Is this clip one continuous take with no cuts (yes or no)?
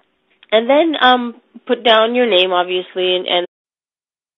yes